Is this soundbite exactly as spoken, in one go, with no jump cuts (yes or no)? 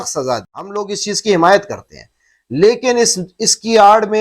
no